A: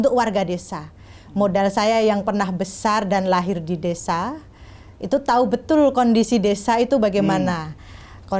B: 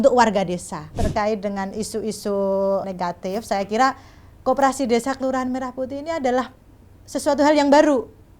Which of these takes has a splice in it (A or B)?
B